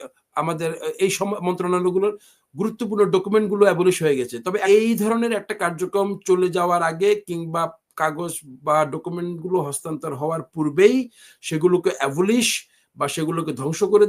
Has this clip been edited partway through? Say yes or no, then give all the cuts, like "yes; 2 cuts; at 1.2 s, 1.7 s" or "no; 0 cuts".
yes; 1 cut; at 4.6 s